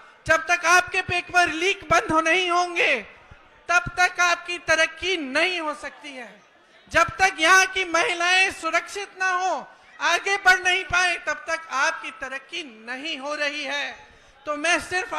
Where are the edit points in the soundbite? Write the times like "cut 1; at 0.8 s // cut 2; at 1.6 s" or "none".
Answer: none